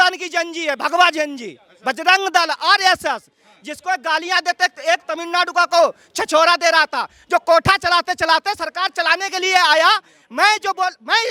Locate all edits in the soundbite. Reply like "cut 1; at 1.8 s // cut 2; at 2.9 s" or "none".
none